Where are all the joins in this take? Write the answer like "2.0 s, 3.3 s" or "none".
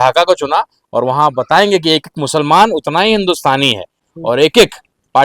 4.0 s